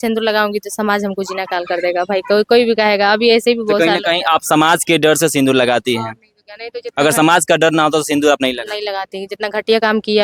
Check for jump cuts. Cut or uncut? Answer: uncut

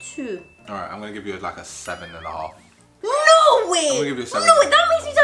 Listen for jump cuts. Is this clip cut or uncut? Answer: cut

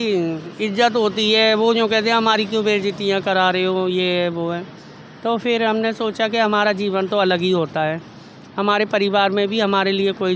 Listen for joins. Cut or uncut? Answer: uncut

